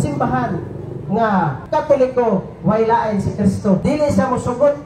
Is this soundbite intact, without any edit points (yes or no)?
no